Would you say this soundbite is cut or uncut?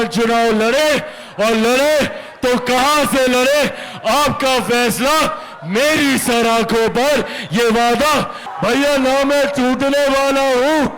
cut